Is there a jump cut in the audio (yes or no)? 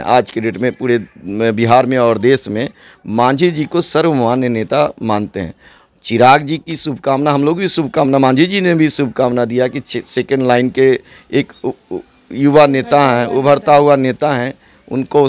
no